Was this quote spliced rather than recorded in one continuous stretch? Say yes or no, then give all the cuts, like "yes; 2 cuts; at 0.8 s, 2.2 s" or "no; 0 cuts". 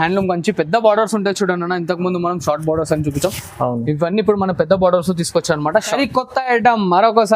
yes; 1 cut; at 5.9 s